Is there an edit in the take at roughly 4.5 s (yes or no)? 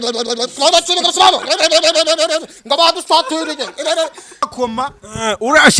yes